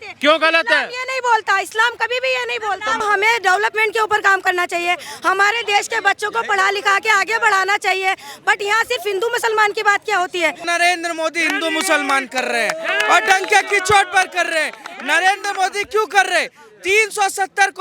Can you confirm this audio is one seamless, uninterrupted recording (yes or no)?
no